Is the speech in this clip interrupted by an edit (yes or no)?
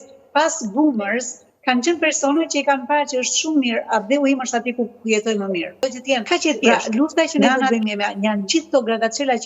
yes